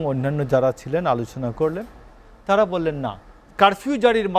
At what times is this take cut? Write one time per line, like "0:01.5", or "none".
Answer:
0:03.4